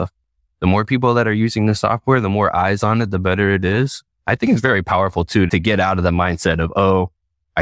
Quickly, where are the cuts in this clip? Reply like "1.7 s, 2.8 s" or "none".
4.0 s, 5.5 s